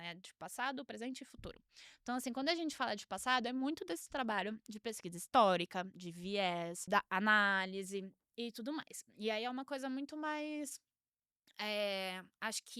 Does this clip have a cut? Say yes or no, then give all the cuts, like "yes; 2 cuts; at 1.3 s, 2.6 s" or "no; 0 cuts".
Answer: yes; 1 cut; at 6.8 s